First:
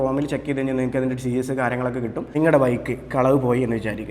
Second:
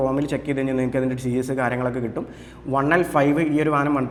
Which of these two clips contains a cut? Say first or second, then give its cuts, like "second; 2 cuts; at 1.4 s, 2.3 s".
first; 1 cut; at 2.2 s